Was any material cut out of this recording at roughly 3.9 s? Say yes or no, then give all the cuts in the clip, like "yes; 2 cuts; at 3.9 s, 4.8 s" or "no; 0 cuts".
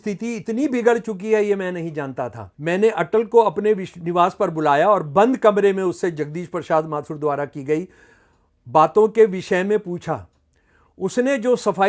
no; 1 cut; at 2.4 s